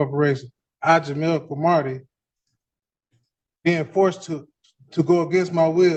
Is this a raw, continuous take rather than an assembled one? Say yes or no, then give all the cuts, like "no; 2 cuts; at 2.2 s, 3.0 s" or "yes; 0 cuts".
yes; 0 cuts